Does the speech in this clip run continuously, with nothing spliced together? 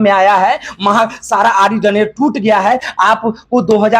no; 1 cut; at 3.0 s

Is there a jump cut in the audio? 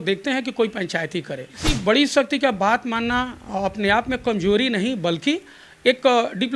yes; 1 cut; at 1.8 s

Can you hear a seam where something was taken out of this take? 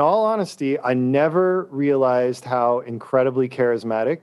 no; 0 cuts

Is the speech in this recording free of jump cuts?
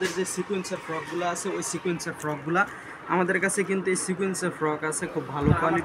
yes; 0 cuts

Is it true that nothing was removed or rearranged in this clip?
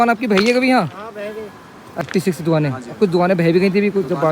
no; 1 cut; at 2.1 s

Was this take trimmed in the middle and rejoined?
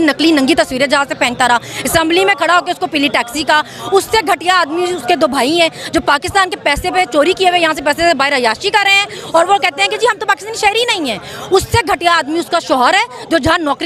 no; 0 cuts

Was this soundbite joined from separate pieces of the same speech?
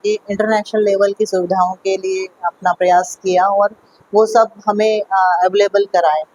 no; 0 cuts

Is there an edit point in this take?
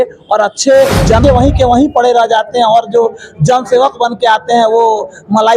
yes; 1 cut; at 1.2 s

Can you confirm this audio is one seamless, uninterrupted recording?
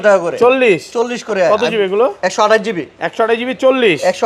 yes; 0 cuts

